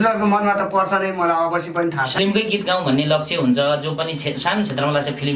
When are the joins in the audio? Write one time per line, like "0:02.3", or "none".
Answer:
0:02.1